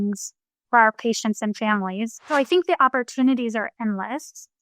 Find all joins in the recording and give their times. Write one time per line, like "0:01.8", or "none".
0:02.2